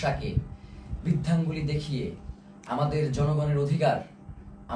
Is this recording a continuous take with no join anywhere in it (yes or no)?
yes